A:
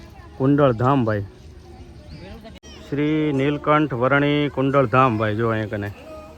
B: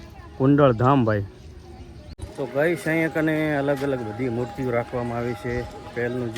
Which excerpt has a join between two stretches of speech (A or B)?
B